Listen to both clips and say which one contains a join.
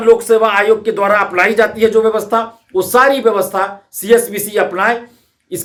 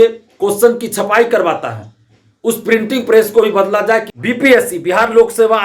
second; 1 cut; at 4.1 s

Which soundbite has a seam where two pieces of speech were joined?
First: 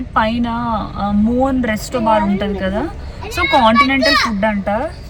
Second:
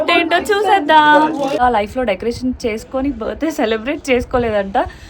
second; 1 cut; at 1.6 s

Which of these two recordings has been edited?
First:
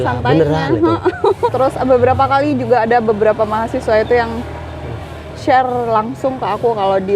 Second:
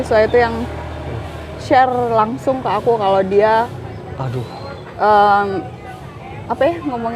first; 1 cut; at 1.5 s

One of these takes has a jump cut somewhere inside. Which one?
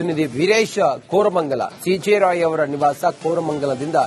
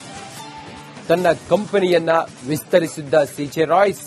second; 1 cut; at 1.0 s

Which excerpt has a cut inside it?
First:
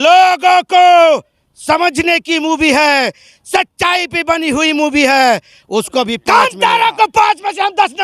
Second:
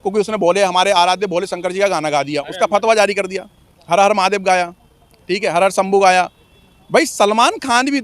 first; 1 cut; at 6.2 s

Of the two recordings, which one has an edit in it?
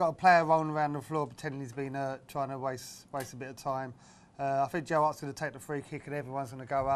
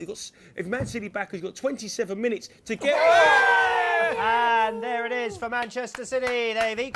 second; 1 cut; at 5.1 s

